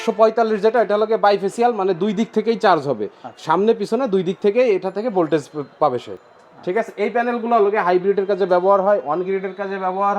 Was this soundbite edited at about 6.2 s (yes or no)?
no